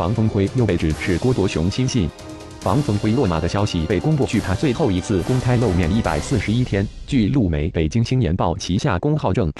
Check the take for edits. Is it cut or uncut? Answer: cut